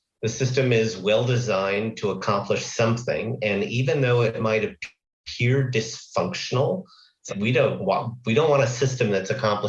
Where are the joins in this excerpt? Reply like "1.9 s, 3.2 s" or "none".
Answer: none